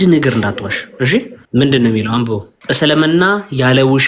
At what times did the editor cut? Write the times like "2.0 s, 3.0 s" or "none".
1.4 s, 2.5 s